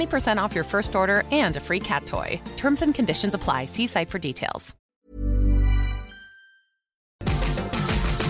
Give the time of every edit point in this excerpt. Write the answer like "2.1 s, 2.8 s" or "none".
4.9 s, 7.2 s